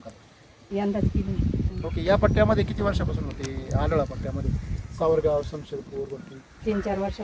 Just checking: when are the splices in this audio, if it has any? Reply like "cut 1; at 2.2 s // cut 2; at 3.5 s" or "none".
cut 1; at 1.7 s